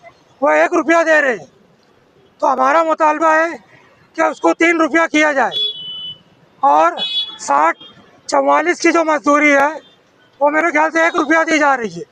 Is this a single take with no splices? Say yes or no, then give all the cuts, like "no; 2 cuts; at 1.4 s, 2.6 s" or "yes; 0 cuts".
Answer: yes; 0 cuts